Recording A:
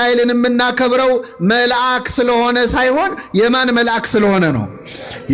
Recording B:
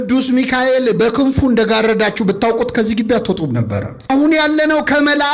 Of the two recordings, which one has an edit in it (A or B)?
B